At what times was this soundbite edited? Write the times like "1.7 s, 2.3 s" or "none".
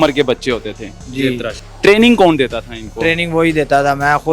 1.6 s